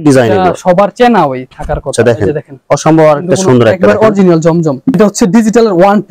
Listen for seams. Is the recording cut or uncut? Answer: cut